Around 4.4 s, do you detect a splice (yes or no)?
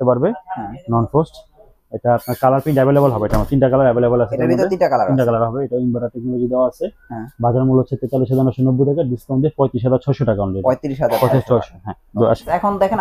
no